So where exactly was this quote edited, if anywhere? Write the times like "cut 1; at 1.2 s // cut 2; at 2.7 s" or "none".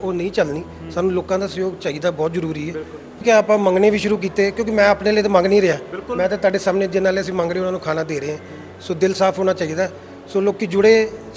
cut 1; at 3.2 s